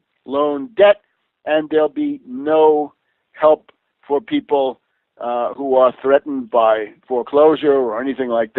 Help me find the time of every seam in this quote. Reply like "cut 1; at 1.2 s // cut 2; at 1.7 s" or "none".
none